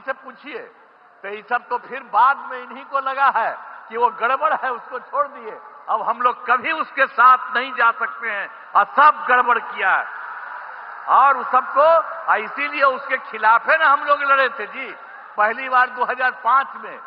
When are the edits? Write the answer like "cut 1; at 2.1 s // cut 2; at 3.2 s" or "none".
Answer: none